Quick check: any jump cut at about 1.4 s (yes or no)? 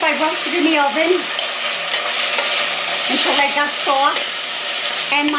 no